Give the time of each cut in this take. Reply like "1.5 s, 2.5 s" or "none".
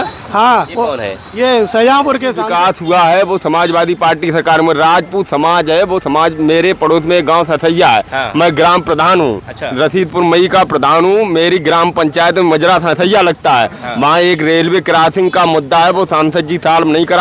2.4 s